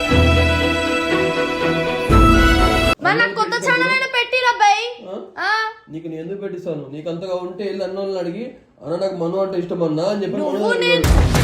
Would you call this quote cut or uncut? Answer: cut